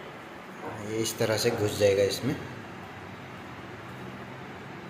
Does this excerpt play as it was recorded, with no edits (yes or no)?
yes